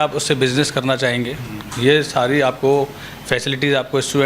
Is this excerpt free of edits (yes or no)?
yes